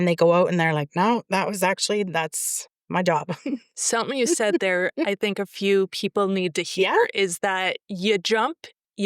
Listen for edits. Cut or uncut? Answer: cut